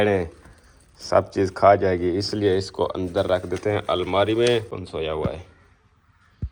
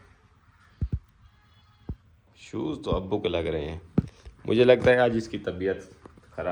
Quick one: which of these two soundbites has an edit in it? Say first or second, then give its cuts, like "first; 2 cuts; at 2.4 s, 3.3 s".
first; 1 cut; at 4.7 s